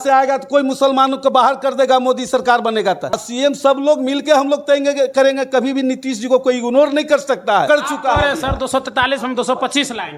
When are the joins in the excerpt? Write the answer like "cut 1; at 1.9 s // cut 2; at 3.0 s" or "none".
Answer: cut 1; at 3.2 s // cut 2; at 7.7 s